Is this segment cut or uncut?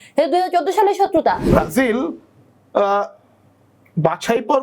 cut